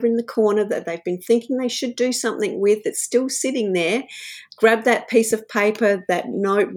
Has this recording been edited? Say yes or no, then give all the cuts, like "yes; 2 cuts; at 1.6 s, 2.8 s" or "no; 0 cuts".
yes; 1 cut; at 4.4 s